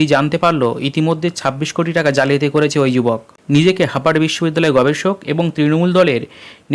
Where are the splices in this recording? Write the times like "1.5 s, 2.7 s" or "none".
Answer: 3.3 s